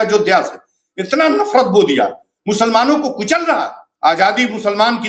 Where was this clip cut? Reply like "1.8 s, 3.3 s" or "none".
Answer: 3.8 s